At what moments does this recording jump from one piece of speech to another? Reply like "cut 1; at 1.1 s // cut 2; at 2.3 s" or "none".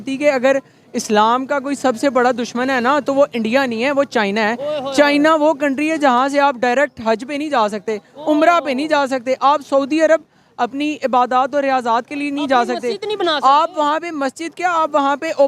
none